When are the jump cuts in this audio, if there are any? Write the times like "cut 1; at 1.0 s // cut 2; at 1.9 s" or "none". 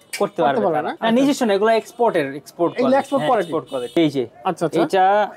cut 1; at 0.9 s // cut 2; at 3.9 s